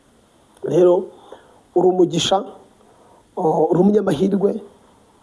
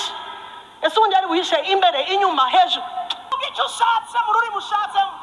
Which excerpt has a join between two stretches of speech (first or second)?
second